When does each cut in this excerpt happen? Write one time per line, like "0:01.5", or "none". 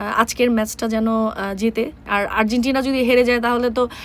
0:02.0

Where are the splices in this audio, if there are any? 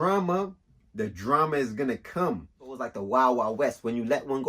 0:02.9

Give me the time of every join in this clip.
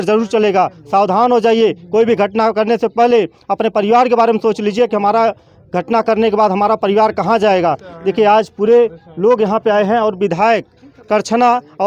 none

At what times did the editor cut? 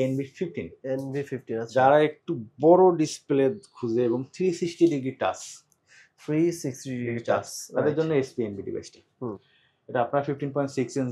none

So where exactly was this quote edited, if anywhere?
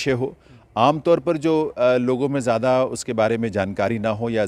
none

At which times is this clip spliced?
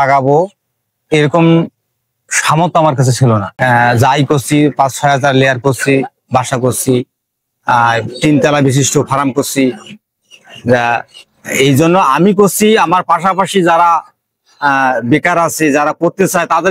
0:03.5

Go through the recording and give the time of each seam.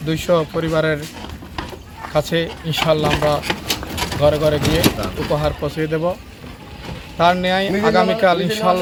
none

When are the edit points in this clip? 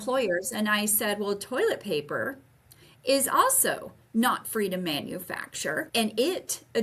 0:05.9

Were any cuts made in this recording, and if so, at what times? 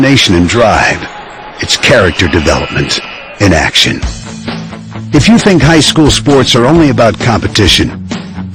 none

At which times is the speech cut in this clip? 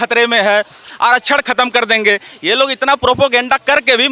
none

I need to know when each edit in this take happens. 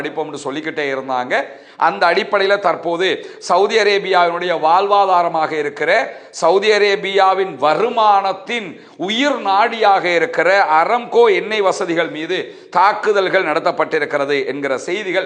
none

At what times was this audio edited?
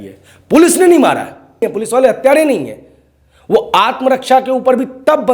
0:01.7

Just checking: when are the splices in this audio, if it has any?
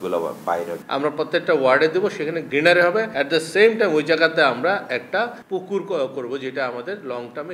0:00.8
0:02.4
0:03.1
0:05.4

